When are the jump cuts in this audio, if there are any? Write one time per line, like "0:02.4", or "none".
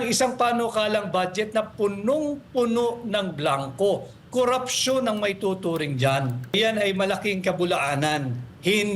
0:06.5